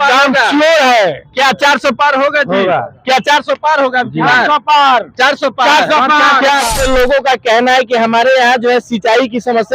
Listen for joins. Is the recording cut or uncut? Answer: cut